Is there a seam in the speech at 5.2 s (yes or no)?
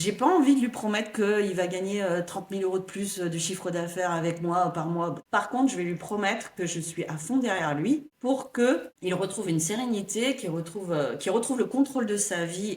yes